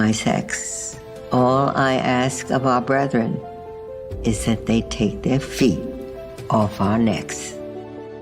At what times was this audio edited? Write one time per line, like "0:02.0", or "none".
0:07.3